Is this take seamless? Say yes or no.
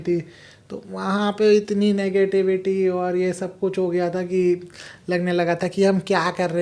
yes